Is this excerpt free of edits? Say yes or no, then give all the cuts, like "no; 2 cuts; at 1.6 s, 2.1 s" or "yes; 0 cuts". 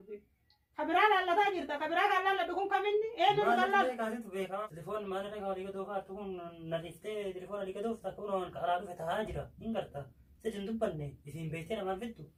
yes; 0 cuts